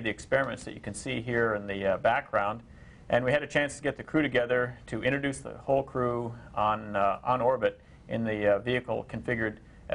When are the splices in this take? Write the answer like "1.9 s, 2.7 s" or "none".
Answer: 4.9 s